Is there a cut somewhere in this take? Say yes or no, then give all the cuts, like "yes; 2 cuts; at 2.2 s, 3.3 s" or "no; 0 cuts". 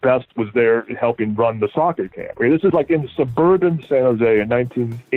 no; 0 cuts